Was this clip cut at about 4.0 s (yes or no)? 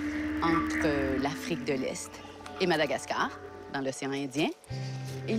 yes